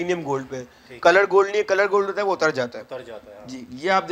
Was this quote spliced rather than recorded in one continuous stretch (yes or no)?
no